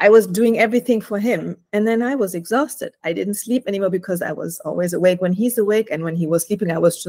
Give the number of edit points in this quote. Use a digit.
0